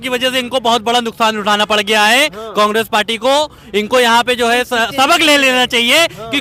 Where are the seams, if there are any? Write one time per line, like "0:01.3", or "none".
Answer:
none